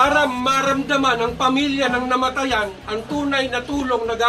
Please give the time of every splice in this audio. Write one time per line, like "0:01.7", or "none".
none